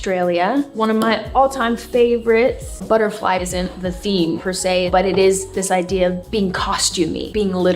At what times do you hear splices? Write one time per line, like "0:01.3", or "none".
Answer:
0:02.7